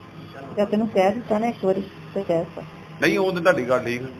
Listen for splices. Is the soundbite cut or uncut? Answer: uncut